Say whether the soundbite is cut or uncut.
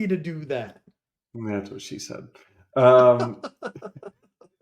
uncut